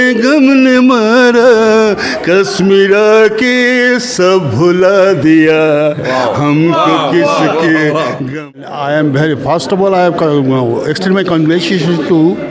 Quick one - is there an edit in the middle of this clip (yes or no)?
yes